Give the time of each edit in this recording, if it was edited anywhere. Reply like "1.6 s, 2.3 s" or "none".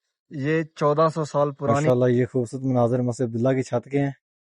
1.8 s